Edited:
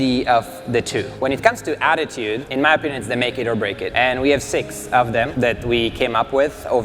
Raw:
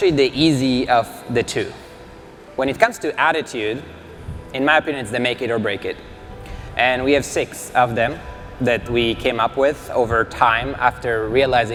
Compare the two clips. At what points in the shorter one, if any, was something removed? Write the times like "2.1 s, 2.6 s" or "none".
1.1 s, 2.4 s, 3.9 s, 5.3 s